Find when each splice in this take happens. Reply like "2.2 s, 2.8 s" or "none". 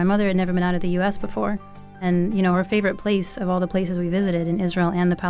2.0 s

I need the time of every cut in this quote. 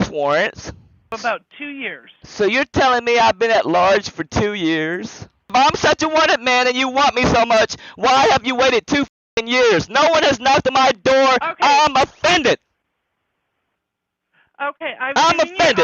1.1 s, 5.5 s

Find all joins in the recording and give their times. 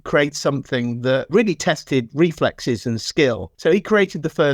1.3 s, 3.5 s

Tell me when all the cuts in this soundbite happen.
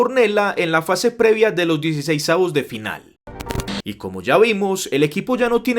3.4 s

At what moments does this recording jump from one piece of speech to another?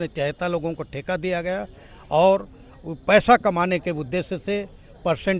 none

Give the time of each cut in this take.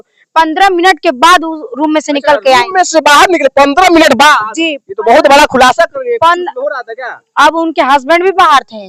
none

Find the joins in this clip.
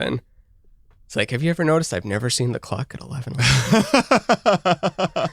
3.3 s

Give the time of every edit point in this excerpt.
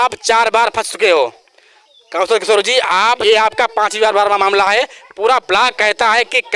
3.2 s

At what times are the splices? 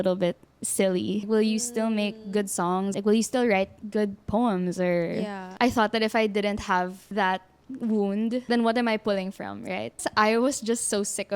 10.0 s

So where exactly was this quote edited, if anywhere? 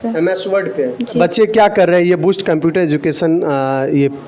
none

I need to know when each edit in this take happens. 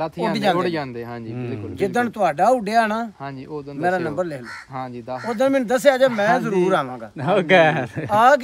none

